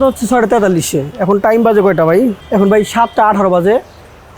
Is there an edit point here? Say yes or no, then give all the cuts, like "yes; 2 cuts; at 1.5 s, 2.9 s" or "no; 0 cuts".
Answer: yes; 1 cut; at 2.4 s